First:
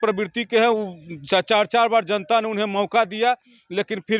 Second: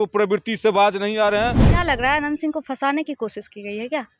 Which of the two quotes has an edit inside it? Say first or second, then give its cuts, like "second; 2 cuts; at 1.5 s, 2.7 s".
second; 1 cut; at 1.7 s